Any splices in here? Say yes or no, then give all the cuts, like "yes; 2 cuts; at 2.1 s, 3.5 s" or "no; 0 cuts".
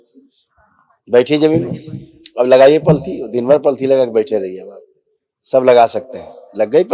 no; 0 cuts